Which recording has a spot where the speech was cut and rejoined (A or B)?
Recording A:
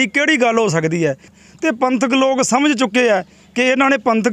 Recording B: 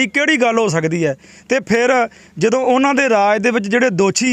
A